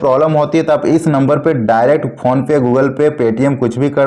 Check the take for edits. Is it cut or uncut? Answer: uncut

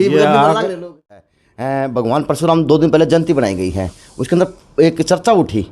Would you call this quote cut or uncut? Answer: cut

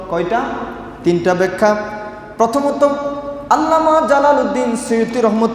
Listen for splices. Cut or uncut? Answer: uncut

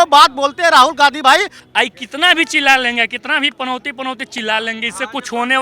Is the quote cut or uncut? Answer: cut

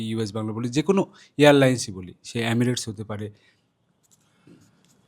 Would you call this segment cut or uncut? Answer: uncut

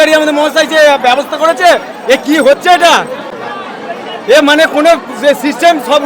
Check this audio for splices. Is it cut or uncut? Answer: uncut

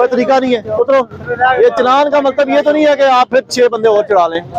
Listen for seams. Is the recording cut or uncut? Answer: uncut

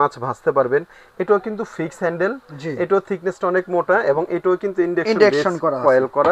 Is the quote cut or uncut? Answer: uncut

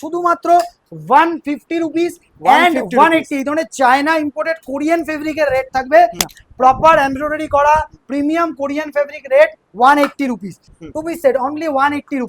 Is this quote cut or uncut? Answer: cut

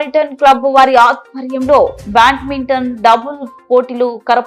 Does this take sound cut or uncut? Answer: uncut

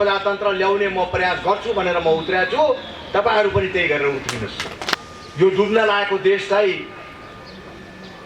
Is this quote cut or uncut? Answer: cut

